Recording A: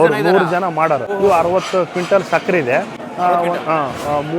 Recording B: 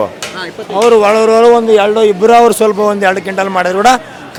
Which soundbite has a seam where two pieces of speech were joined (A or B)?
A